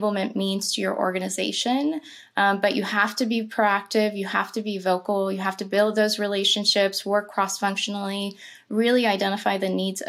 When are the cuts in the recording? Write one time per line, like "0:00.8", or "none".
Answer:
none